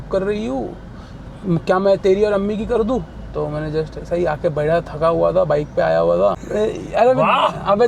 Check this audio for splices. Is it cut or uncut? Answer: cut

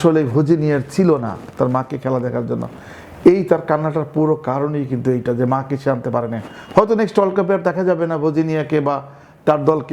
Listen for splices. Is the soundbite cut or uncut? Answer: uncut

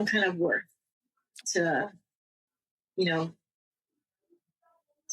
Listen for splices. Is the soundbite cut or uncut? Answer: cut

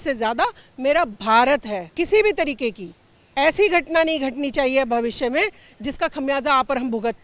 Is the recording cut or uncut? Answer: cut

